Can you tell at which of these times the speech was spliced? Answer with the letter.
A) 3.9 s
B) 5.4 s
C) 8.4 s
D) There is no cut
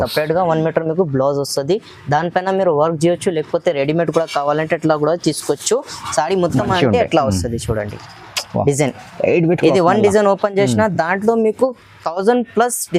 D